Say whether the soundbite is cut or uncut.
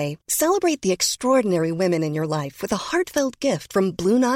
uncut